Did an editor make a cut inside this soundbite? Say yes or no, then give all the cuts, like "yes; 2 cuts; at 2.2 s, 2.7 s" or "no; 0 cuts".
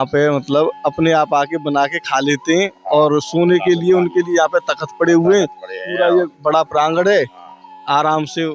no; 0 cuts